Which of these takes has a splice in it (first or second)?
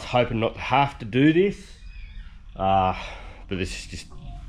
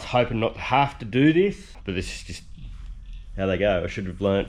second